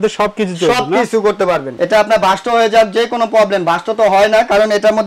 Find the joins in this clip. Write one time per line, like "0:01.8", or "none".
0:01.7